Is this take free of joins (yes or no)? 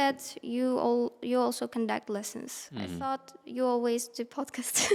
yes